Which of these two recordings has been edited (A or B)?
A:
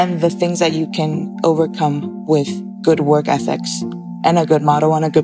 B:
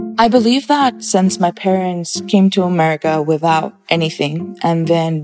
B